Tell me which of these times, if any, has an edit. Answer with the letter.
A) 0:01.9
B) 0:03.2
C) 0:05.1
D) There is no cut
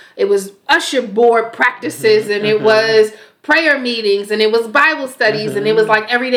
D